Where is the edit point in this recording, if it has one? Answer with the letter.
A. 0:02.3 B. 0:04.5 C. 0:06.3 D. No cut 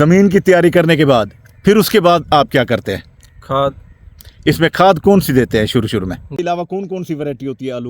C